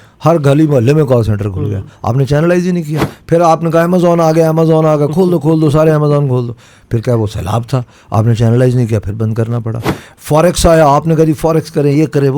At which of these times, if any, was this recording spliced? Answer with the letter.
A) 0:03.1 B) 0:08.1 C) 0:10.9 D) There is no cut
A